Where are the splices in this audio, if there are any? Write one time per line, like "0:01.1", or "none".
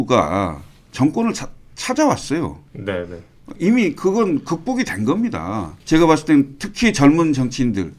0:05.7